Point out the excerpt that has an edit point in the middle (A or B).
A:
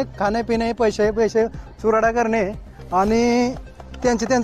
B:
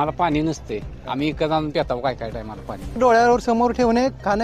B